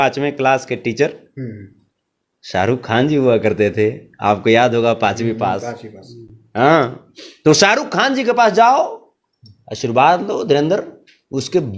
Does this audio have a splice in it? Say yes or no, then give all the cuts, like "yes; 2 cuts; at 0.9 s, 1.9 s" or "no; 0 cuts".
no; 0 cuts